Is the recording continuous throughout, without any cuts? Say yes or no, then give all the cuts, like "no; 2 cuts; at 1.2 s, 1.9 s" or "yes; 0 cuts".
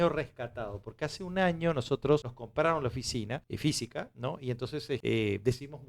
no; 3 cuts; at 2.4 s, 3.5 s, 5.0 s